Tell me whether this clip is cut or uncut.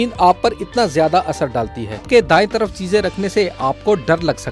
cut